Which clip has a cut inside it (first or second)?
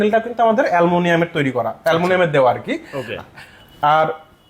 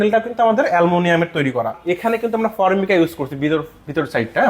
second